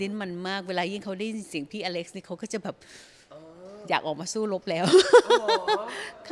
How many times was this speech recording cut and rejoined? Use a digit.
0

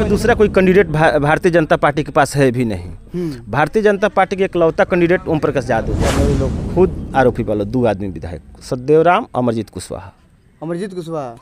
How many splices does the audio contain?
1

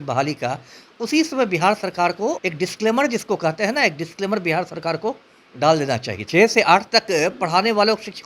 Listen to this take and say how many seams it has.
2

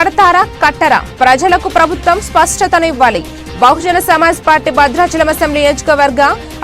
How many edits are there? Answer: 0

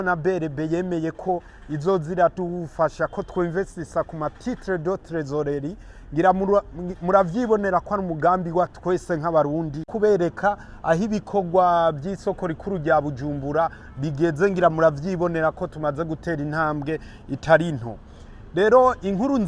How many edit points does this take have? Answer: 1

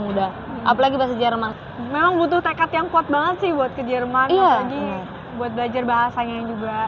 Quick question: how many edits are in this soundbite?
1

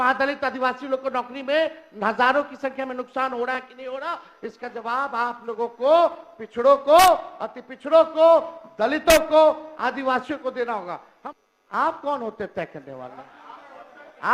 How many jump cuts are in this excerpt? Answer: 1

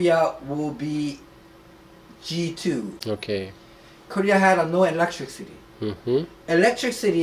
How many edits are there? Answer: 1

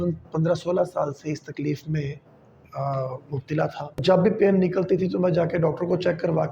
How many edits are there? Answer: 1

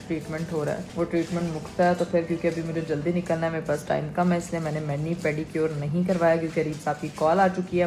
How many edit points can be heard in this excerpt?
0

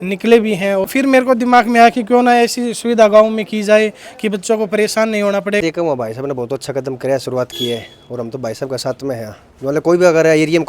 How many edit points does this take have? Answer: 2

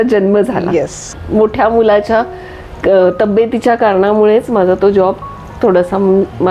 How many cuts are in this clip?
1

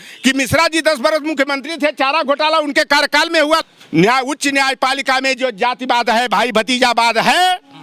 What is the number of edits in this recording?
1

